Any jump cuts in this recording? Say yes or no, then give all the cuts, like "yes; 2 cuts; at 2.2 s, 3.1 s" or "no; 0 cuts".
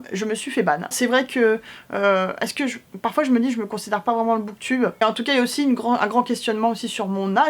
yes; 2 cuts; at 0.9 s, 5.0 s